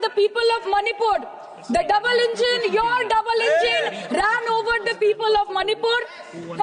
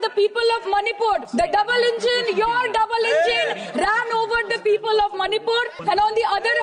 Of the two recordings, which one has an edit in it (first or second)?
second